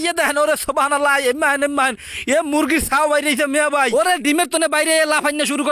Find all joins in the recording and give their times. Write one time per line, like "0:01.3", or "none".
none

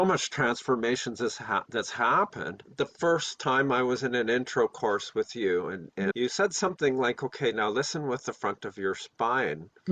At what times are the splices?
0:02.6
0:06.1

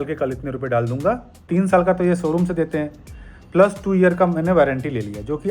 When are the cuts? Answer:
0:01.4

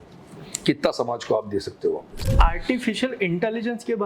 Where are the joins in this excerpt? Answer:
0:02.2

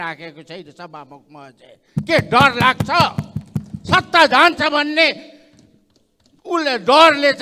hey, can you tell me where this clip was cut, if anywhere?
none

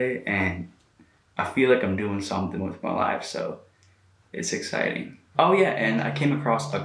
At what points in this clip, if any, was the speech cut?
0:05.1

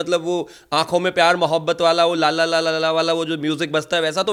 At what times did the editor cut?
none

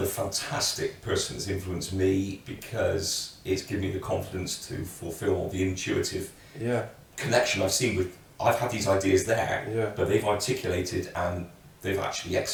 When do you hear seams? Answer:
none

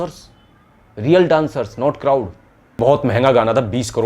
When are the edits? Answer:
0:02.8

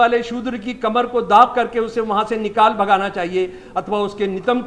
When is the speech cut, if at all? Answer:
none

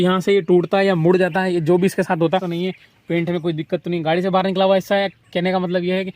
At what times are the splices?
0:02.3

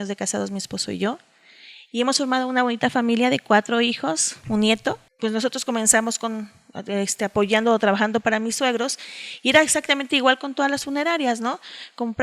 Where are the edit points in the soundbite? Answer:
0:05.1

